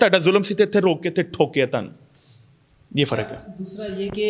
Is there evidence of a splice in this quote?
no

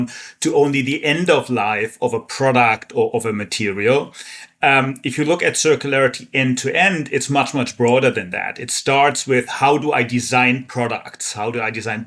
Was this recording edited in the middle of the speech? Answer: no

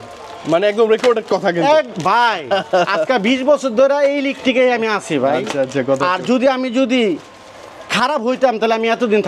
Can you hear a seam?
no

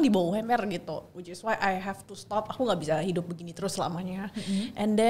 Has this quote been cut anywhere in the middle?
no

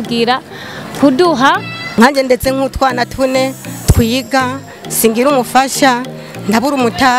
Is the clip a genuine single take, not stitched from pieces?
no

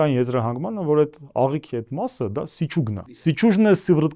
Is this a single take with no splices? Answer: no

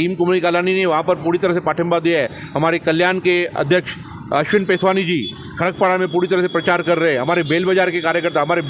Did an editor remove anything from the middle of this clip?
no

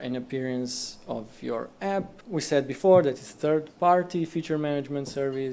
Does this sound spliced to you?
yes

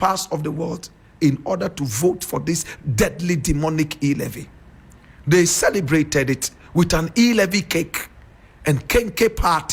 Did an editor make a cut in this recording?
no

